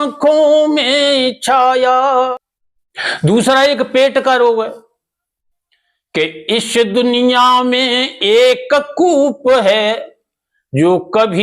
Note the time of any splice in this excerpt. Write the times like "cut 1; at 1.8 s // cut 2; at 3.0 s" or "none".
cut 1; at 2.3 s